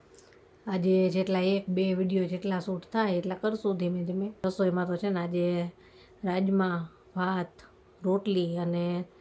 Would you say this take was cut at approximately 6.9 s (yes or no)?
no